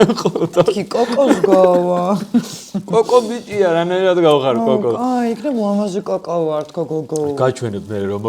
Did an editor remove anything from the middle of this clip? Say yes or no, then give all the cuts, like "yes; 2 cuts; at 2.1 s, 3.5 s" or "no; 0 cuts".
no; 0 cuts